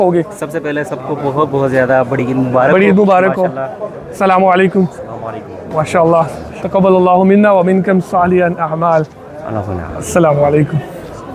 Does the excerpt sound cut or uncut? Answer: uncut